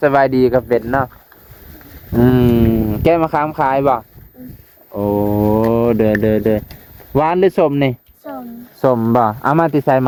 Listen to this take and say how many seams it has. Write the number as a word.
zero